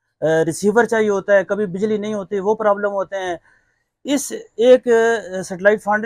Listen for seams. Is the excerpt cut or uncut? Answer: uncut